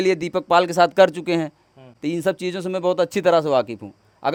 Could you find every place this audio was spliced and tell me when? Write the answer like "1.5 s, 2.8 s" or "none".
none